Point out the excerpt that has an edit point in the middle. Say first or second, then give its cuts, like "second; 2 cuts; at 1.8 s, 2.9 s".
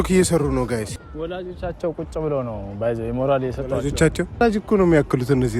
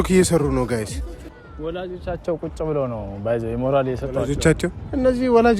first; 2 cuts; at 1.0 s, 4.4 s